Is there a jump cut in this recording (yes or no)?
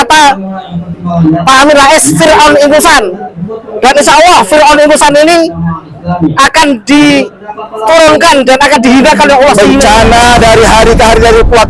yes